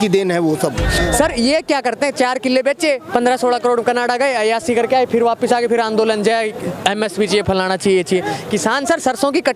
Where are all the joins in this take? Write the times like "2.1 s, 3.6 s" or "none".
1.0 s